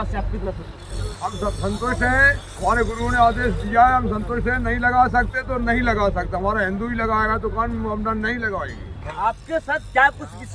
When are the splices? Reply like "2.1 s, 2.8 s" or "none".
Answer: 9.1 s